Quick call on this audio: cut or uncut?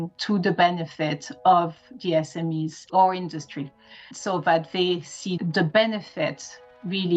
uncut